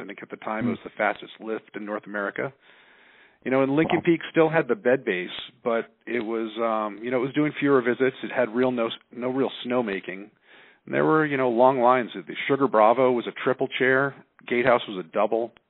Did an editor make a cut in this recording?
no; 0 cuts

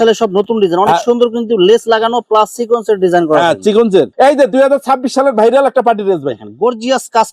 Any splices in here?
no; 0 cuts

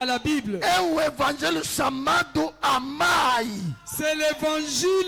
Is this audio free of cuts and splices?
yes; 0 cuts

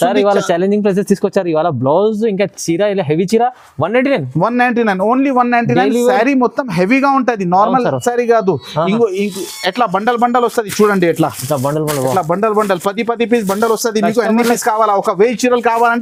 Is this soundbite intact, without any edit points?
yes; 0 cuts

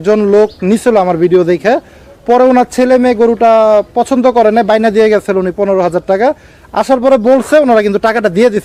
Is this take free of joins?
yes; 0 cuts

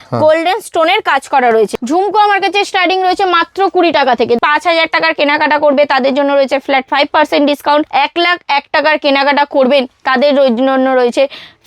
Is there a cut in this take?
yes; 3 cuts; at 1.8 s, 4.4 s, 7.9 s

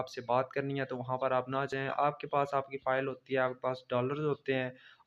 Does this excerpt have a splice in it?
no; 0 cuts

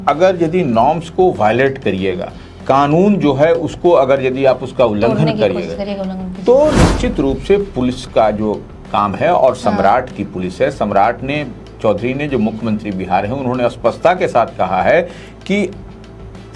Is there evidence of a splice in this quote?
no; 0 cuts

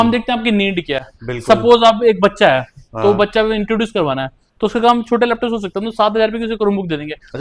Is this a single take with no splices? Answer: yes; 0 cuts

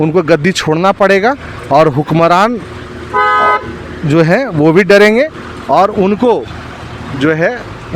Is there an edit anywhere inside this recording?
no; 0 cuts

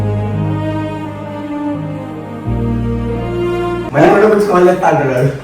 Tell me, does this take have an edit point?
yes; 1 cut; at 3.9 s

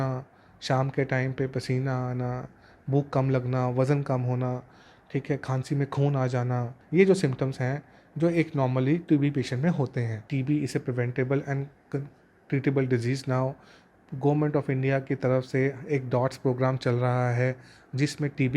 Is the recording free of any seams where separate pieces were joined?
no; 2 cuts; at 6.7 s, 10.2 s

